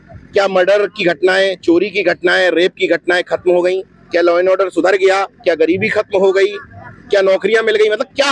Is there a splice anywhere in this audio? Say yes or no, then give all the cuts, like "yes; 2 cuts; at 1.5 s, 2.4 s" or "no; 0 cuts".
no; 0 cuts